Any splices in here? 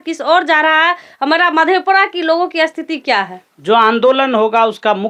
no; 0 cuts

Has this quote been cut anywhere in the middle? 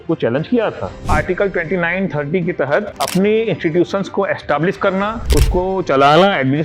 yes; 3 cuts; at 1.1 s, 3.0 s, 5.2 s

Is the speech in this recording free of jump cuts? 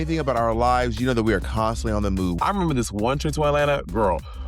no; 1 cut; at 2.4 s

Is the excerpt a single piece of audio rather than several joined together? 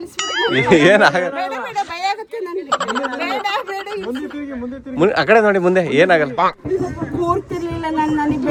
yes; 0 cuts

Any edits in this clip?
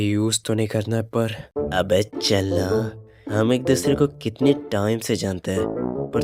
no; 0 cuts

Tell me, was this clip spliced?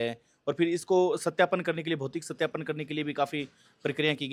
no; 0 cuts

